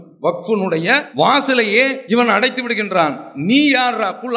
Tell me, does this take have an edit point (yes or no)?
yes